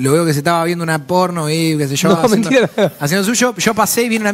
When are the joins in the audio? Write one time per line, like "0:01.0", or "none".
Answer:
none